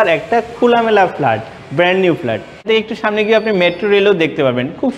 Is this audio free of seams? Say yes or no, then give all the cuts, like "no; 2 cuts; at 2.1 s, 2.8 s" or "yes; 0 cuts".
no; 1 cut; at 2.6 s